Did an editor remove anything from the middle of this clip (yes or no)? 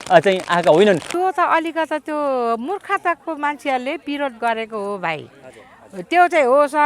yes